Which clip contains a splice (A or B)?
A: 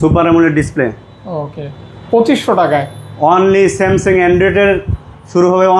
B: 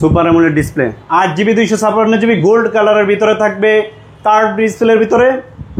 B